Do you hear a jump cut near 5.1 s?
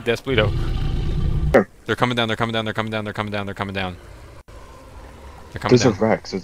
no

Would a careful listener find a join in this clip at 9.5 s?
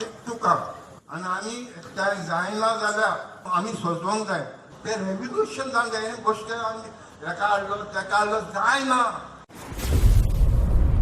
yes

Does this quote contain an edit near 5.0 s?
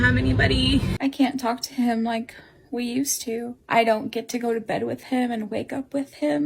no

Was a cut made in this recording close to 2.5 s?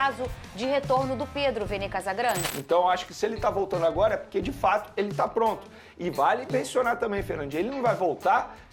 yes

